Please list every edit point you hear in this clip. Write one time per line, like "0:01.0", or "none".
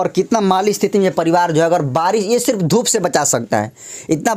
none